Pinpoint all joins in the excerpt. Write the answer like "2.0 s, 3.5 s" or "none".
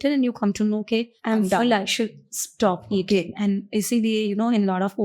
1.1 s